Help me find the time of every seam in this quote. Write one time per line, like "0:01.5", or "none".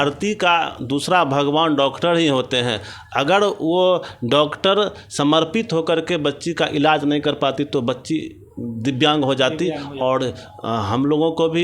none

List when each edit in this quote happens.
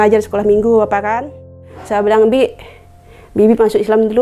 0:01.6

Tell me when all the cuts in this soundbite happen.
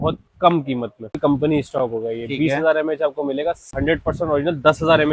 0:01.2
0:03.7

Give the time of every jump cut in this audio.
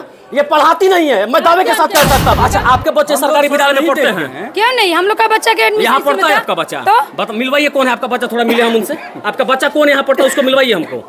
0:02.4

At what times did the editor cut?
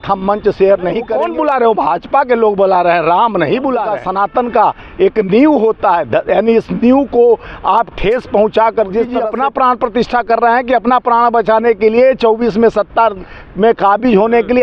0:01.1
0:03.9
0:09.2

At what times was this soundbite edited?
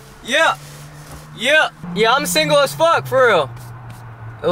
none

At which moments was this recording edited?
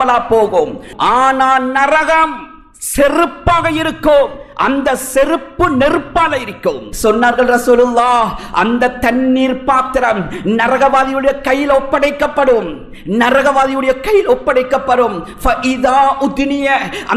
0:00.9
0:06.9

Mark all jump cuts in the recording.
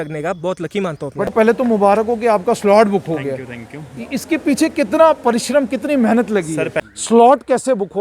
0:01.3
0:06.9

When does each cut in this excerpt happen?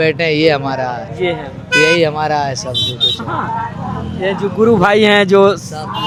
none

